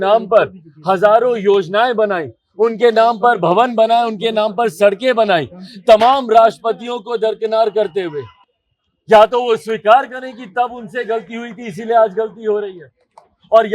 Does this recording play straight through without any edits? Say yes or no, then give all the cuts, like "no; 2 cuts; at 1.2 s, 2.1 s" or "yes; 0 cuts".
yes; 0 cuts